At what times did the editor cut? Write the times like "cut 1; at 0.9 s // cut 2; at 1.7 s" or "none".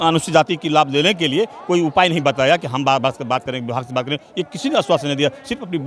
none